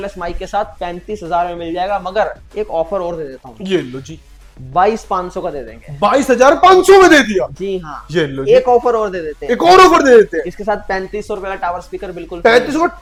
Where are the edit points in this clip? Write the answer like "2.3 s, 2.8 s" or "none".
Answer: none